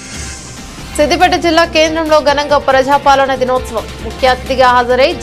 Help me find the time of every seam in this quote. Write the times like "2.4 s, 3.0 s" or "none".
0.9 s